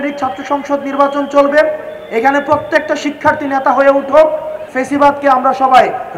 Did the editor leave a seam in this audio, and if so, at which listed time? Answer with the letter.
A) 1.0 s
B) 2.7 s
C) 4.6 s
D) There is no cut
C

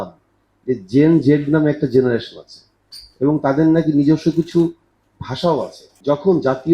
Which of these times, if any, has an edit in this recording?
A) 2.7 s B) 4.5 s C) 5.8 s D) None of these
C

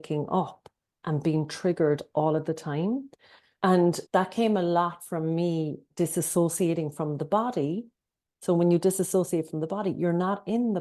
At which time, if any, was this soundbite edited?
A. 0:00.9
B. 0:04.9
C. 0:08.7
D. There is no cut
D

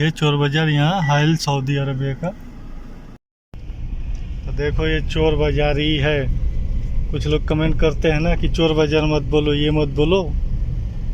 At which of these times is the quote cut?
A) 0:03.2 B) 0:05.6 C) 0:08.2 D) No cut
A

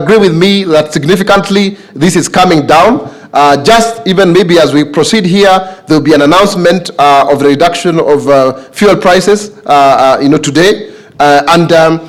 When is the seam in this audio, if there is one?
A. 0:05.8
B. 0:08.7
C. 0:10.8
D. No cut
D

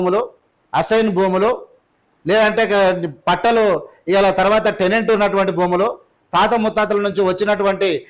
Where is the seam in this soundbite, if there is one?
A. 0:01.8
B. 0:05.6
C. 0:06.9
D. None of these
D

